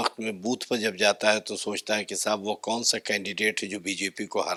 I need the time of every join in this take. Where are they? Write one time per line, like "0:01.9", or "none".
none